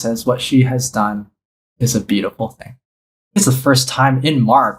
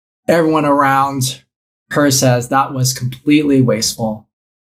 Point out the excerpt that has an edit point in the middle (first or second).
first